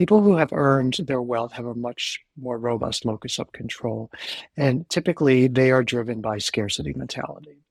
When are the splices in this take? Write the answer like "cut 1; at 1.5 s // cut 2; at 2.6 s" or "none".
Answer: none